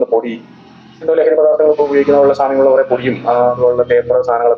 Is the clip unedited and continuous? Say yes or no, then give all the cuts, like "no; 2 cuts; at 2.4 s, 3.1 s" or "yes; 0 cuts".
yes; 0 cuts